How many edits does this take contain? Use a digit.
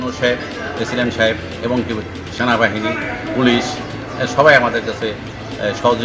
0